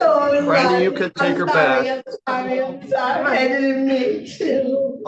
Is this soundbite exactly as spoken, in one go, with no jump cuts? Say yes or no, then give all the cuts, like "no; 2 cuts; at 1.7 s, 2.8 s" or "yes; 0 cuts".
yes; 0 cuts